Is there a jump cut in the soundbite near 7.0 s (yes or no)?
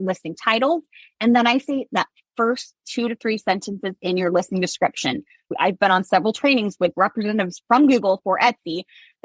yes